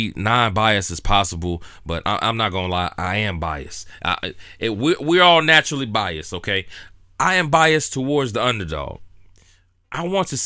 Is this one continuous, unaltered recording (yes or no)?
yes